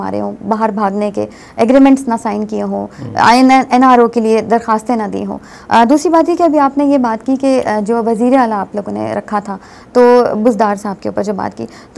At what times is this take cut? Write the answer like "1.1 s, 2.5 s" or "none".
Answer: none